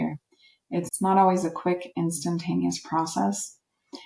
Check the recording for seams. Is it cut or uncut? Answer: cut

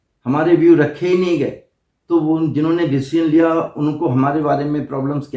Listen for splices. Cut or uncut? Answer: uncut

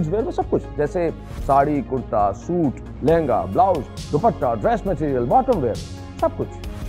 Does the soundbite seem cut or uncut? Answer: uncut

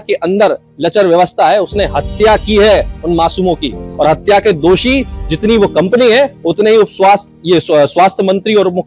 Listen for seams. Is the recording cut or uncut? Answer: uncut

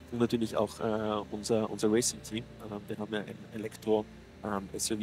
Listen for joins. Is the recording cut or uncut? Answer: uncut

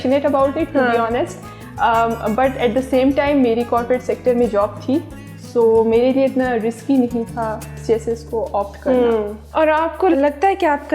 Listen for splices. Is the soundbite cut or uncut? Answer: uncut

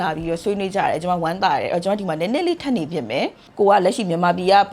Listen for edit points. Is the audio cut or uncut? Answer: cut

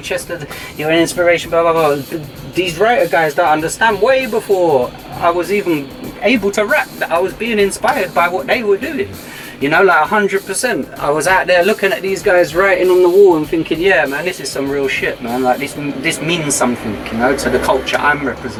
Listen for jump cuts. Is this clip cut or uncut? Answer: uncut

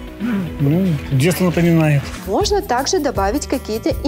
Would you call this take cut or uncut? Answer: cut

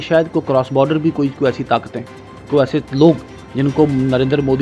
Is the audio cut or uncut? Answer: uncut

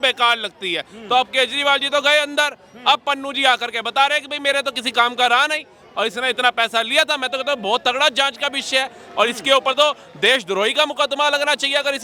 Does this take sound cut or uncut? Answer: uncut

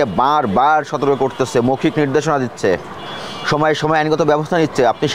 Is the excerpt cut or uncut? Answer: uncut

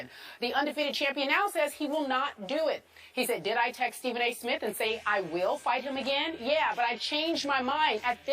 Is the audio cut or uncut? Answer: uncut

